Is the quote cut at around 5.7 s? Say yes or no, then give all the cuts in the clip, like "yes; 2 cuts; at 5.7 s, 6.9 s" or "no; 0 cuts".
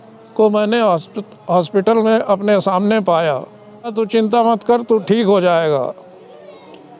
no; 1 cut; at 3.9 s